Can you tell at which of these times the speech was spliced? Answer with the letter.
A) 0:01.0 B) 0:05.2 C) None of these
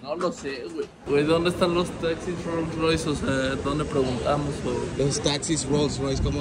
A